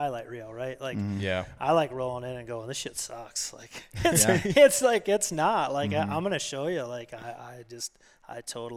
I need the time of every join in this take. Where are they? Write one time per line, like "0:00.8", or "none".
none